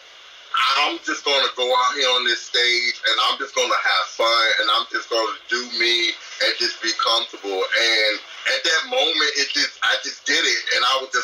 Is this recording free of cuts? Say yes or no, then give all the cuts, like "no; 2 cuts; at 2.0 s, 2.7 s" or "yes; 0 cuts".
yes; 0 cuts